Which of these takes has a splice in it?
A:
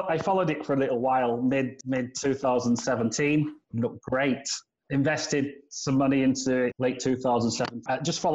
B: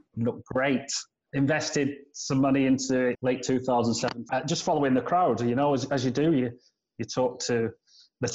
A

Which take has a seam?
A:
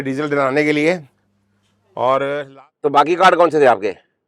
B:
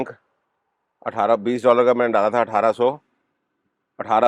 A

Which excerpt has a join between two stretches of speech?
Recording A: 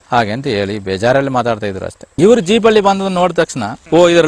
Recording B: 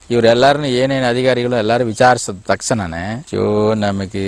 A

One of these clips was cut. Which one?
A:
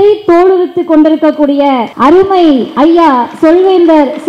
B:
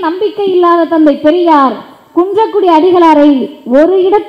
A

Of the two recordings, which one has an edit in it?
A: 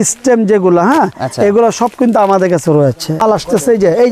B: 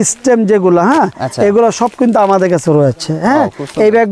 A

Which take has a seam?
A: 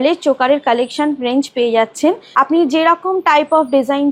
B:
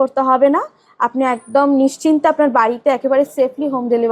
A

